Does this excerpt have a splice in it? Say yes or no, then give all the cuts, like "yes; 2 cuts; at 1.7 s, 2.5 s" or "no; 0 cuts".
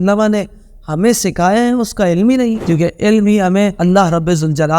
yes; 1 cut; at 2.6 s